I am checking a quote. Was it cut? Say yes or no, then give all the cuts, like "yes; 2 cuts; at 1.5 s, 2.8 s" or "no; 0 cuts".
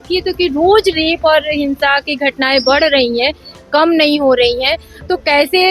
no; 0 cuts